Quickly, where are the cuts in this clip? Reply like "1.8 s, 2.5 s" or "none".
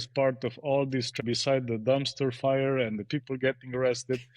1.2 s